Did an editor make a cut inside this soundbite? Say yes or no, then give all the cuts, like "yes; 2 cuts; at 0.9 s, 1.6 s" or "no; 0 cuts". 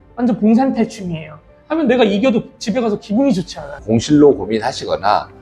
yes; 1 cut; at 3.7 s